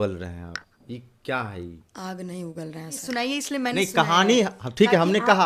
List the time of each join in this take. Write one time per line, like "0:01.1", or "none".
0:03.0